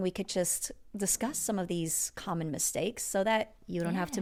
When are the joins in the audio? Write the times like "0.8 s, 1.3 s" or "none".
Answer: none